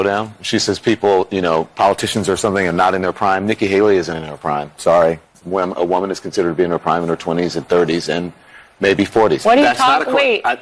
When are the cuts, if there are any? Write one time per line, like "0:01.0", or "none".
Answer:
0:09.4